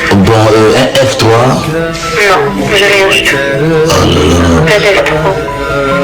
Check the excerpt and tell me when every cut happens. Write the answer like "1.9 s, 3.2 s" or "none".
none